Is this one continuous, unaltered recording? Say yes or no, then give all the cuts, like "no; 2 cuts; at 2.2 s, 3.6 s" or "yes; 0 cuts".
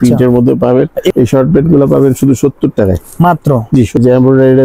no; 2 cuts; at 1.1 s, 4.0 s